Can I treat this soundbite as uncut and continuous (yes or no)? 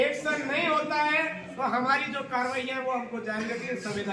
yes